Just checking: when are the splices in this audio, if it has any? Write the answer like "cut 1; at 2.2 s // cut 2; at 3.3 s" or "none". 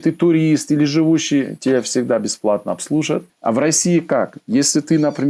cut 1; at 3.3 s